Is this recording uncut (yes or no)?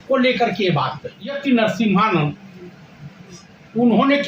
no